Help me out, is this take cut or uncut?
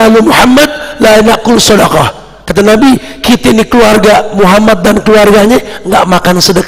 uncut